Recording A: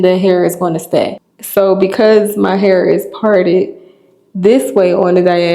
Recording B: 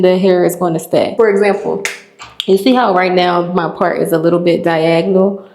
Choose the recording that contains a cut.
A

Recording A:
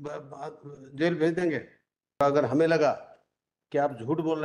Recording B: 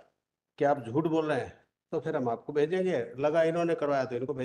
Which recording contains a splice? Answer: A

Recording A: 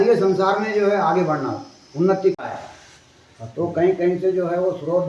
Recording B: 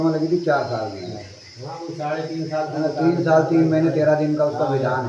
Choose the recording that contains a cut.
A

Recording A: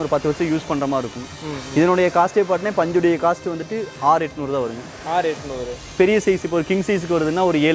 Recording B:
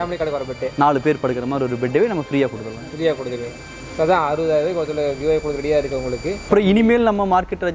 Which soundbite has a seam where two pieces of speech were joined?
B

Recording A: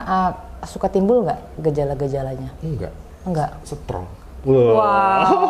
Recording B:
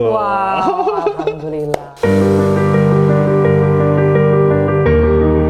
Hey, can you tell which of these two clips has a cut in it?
B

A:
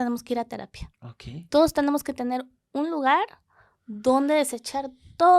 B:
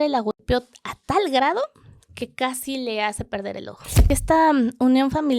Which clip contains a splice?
B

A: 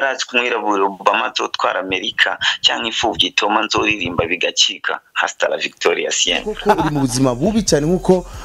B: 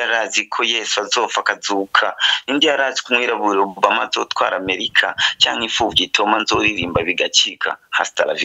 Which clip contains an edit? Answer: A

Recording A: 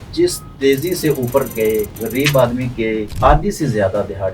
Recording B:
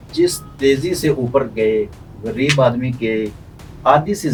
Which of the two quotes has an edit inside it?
A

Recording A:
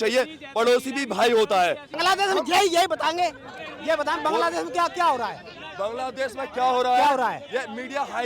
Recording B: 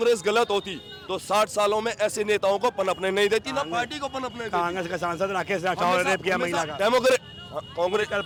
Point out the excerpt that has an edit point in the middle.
A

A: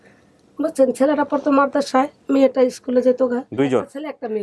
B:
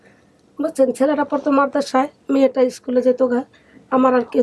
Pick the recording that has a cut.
A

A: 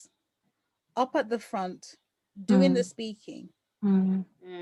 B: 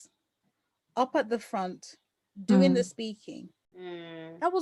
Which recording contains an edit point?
B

